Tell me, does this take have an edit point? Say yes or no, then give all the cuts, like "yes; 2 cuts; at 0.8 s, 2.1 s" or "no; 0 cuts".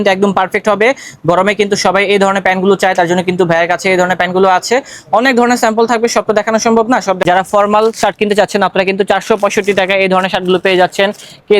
yes; 1 cut; at 7.2 s